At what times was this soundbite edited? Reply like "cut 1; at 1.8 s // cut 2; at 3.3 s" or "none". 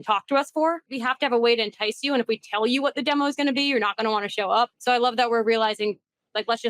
cut 1; at 1.0 s // cut 2; at 4.8 s